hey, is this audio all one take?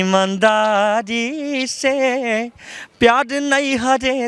yes; 0 cuts

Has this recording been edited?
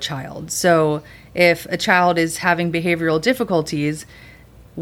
no; 0 cuts

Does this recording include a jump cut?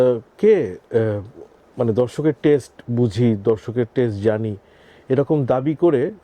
no; 0 cuts

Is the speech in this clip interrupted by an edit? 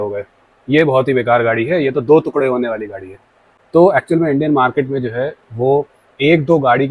no; 0 cuts

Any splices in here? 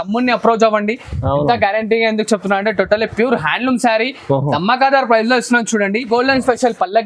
yes; 1 cut; at 6.1 s

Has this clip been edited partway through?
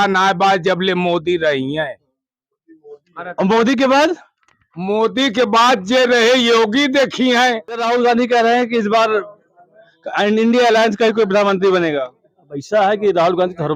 yes; 1 cut; at 7.8 s

